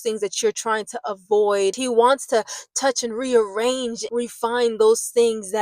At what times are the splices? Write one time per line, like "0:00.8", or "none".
0:01.8
0:04.0